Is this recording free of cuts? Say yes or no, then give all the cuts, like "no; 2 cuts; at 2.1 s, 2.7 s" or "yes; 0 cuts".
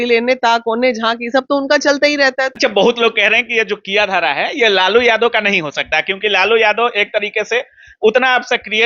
yes; 0 cuts